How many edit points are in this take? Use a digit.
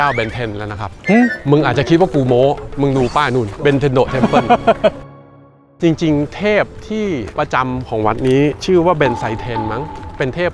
0